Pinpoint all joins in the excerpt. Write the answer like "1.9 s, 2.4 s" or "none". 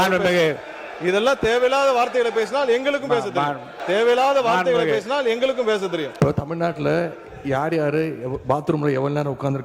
3.7 s, 6.1 s

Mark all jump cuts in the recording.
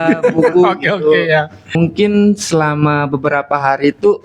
1.7 s

